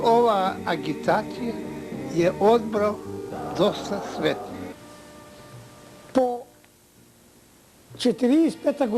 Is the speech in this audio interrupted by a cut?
yes; 1 cut; at 4.7 s

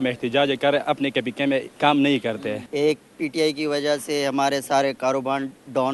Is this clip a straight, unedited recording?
no; 2 cuts; at 1.7 s, 2.6 s

